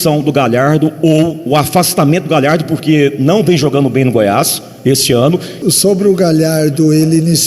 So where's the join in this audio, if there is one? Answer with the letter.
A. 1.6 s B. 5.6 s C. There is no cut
B